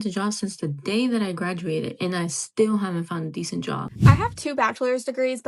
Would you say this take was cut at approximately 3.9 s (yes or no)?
yes